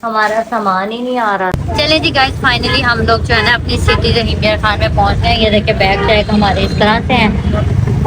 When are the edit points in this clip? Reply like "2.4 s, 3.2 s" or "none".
1.6 s